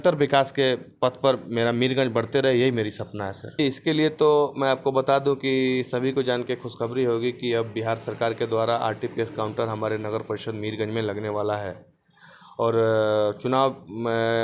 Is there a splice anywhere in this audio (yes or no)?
yes